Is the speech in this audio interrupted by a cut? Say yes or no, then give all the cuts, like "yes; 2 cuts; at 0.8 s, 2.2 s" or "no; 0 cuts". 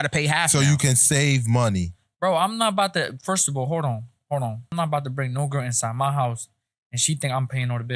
yes; 1 cut; at 4.7 s